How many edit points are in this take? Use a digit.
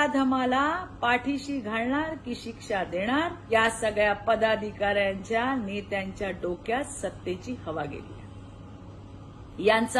1